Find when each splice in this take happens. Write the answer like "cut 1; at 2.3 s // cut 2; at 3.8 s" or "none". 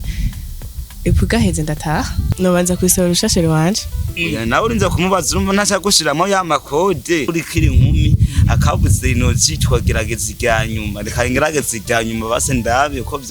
cut 1; at 2.2 s // cut 2; at 7.3 s